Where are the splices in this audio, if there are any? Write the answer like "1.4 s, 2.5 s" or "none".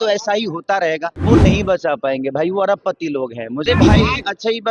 1.2 s, 3.6 s